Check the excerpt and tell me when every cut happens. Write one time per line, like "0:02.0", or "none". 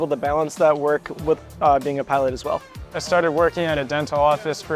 0:03.0